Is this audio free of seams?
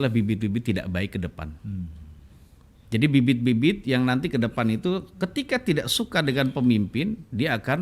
yes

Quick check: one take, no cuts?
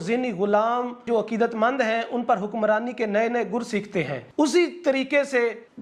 yes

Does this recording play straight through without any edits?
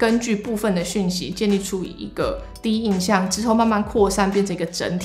yes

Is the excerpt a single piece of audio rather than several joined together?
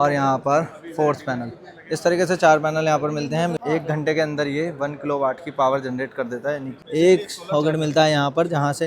no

